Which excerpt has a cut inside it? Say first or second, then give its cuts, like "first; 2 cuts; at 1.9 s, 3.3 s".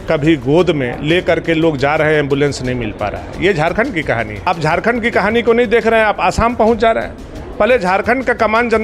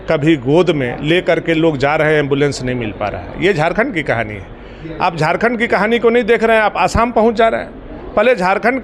first; 1 cut; at 4.3 s